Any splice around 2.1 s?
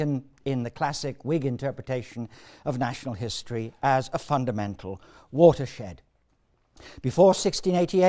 yes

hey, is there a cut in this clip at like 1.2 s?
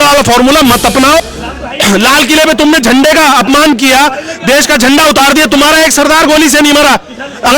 yes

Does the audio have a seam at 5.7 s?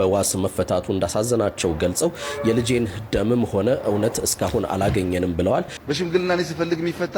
yes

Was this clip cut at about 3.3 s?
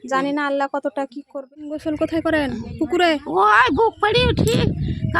no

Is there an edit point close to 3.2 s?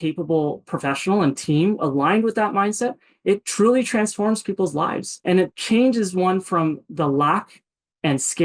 no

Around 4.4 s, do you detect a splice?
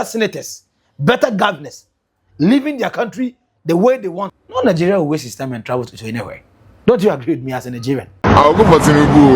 yes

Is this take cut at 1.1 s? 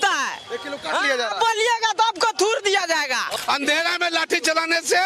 no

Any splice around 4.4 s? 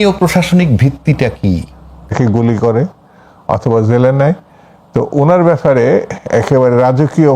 no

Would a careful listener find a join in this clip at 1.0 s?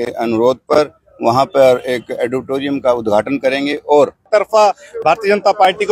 no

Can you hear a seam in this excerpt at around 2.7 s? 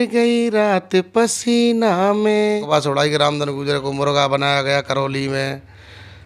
yes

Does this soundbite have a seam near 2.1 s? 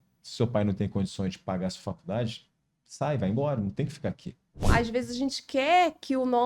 no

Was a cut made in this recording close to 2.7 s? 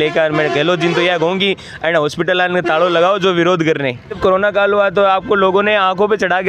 no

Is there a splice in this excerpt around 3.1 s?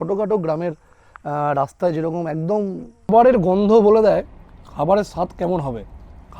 yes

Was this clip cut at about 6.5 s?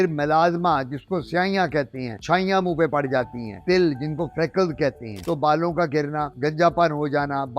no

